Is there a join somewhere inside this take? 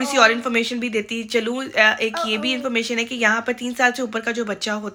no; 0 cuts

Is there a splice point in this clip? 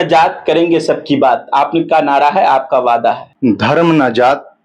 yes; 1 cut; at 3.8 s

